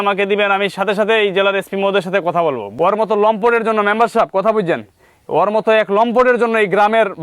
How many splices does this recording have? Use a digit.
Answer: 1